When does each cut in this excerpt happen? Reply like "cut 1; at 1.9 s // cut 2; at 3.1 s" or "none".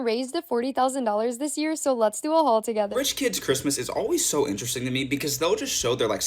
cut 1; at 2.9 s